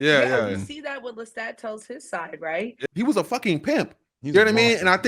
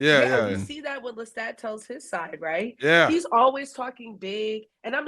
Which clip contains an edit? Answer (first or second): first